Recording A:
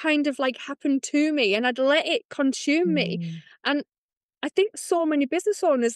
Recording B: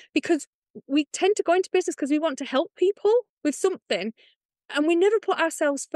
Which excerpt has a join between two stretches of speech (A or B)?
B